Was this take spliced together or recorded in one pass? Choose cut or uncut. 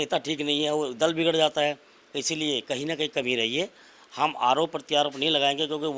uncut